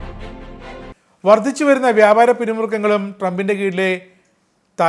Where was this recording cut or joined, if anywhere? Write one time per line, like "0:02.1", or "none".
0:01.0

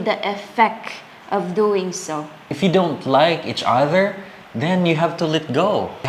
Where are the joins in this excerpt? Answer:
0:02.5

